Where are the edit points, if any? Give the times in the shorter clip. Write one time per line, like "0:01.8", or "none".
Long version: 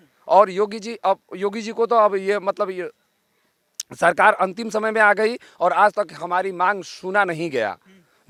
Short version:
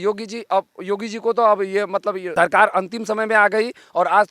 0:02.2